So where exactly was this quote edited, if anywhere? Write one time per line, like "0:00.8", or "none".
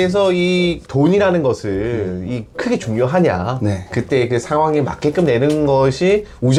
none